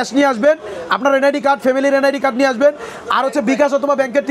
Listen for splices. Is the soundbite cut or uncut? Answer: uncut